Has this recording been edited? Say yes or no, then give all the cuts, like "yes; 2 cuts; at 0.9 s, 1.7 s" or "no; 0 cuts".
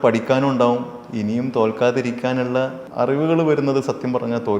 yes; 1 cut; at 2.8 s